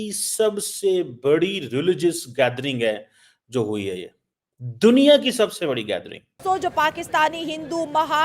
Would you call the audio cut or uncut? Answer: cut